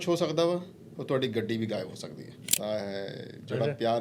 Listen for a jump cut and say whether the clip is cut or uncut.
cut